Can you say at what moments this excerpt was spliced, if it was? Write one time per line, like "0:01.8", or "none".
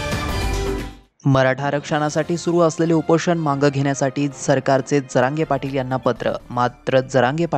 0:00.9